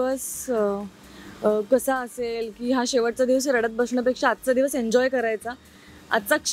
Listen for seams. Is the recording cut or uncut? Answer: uncut